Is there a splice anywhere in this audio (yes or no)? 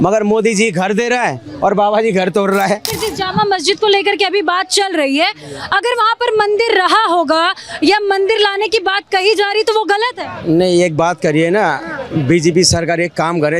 yes